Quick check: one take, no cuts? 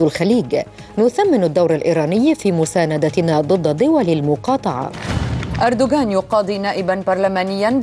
yes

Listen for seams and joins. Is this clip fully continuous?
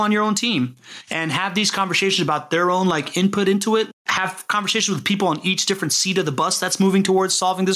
no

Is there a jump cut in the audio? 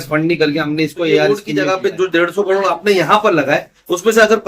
yes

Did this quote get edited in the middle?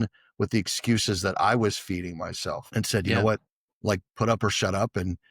yes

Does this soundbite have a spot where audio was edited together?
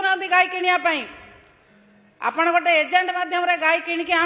no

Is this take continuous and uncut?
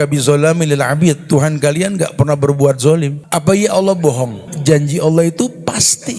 no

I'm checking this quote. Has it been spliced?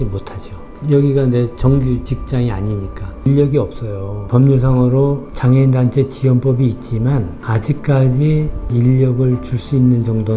yes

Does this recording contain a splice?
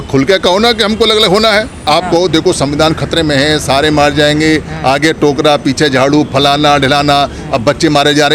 yes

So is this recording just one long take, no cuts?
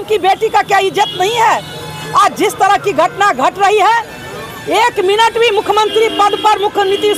yes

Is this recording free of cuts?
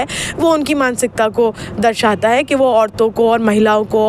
yes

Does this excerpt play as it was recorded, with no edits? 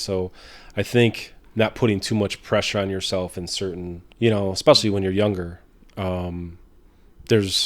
no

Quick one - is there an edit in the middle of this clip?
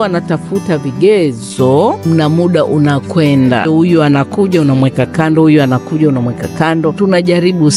yes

